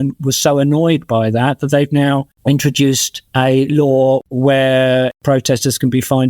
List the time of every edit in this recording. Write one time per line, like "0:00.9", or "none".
0:02.3
0:03.1
0:04.2
0:05.2